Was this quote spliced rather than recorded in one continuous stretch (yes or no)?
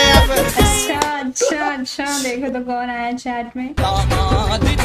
no